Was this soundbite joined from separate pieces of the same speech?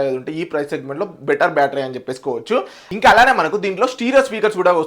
yes; 1 cut; at 2.8 s

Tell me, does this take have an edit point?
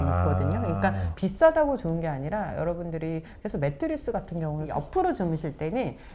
yes; 1 cut; at 4.7 s

